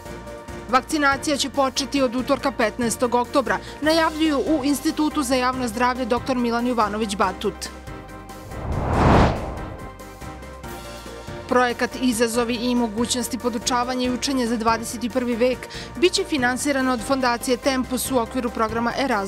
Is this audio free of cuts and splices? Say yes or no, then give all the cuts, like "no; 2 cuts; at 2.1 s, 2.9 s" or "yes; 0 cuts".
yes; 0 cuts